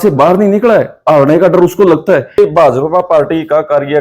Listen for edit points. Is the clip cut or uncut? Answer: cut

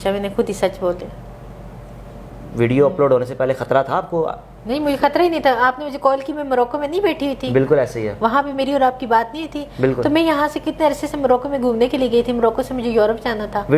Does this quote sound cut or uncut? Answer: uncut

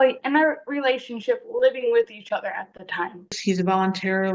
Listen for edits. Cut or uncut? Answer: cut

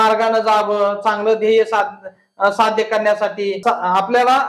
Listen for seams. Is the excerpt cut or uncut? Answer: uncut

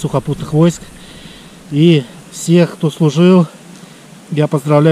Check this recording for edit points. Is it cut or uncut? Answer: uncut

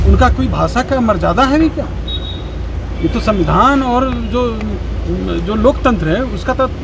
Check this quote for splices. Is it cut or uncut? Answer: uncut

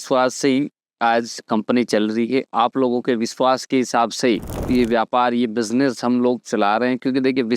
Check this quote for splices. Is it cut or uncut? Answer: uncut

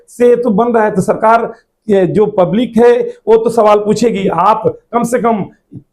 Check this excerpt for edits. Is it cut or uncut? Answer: cut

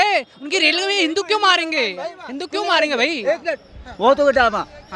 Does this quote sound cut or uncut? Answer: uncut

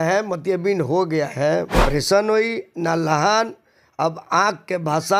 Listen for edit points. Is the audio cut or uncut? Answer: cut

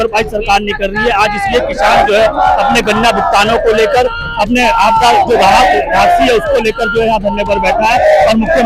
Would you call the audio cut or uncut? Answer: uncut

